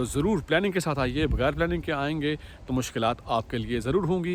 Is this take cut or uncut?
uncut